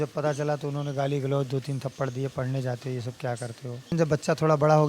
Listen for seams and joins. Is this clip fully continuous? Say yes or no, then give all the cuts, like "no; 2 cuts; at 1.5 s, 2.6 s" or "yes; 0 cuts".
no; 1 cut; at 3.9 s